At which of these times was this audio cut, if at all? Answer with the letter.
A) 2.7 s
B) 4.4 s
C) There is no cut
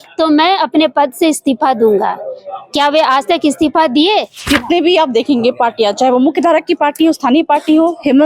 B